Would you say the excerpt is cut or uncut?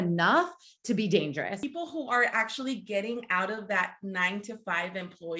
cut